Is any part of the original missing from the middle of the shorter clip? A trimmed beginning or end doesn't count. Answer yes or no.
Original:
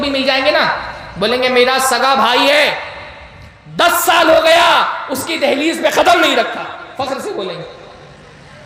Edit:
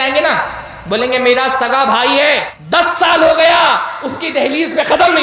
yes